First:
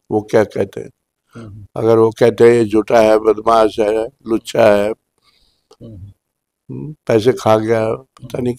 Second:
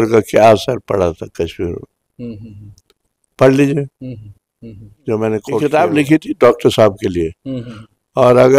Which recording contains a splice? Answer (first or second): second